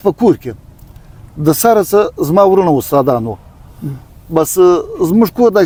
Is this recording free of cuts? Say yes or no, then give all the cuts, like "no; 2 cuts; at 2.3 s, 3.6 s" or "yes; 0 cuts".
yes; 0 cuts